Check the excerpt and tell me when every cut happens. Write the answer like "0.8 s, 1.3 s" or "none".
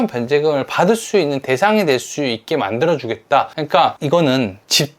3.8 s